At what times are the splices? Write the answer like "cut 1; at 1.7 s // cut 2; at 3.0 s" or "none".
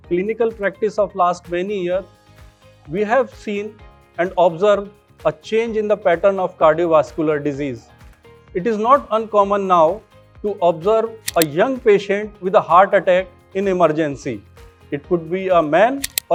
none